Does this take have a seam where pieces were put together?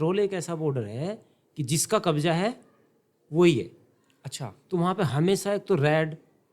no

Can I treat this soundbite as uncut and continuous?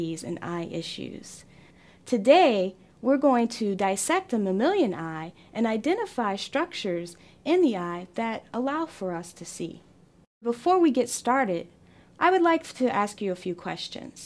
no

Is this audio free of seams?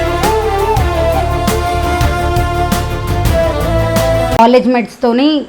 no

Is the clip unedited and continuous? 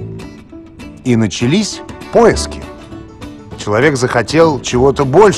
yes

